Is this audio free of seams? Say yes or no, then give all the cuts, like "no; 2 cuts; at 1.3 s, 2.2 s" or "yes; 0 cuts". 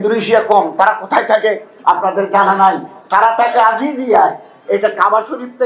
yes; 0 cuts